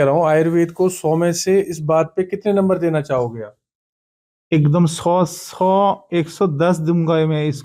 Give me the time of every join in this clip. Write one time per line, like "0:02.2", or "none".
none

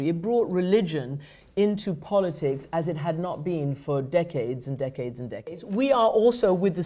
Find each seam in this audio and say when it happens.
0:05.7

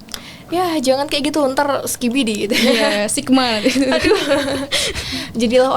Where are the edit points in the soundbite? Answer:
none

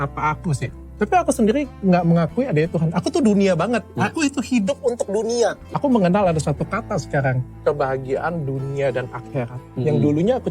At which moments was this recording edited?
0:05.6

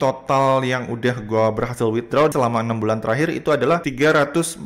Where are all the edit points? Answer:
0:02.3

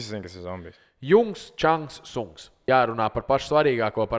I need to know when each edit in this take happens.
0:02.6

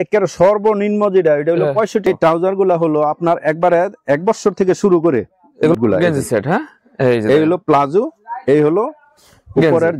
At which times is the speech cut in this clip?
0:02.1
0:05.7

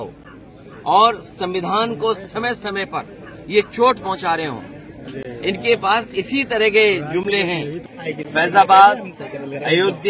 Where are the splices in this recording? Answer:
0:07.9

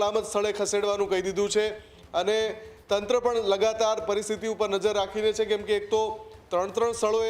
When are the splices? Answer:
none

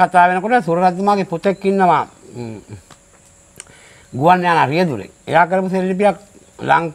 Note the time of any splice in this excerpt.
none

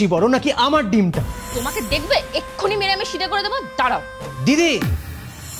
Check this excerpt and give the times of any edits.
0:01.4

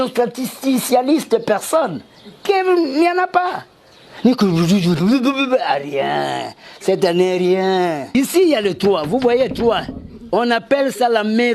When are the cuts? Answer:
0:08.1

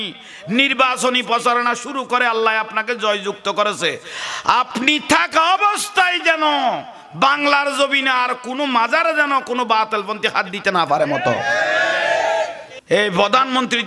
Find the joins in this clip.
0:12.7

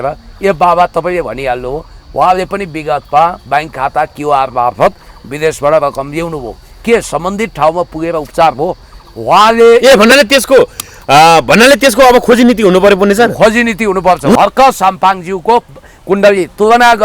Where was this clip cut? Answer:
0:14.4

